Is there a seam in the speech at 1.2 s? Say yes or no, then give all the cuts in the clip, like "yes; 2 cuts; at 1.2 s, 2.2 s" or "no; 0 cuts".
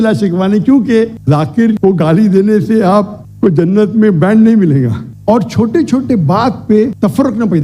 yes; 2 cuts; at 1.2 s, 5.0 s